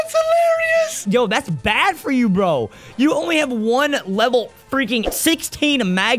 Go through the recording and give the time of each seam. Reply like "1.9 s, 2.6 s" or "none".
1.0 s, 5.1 s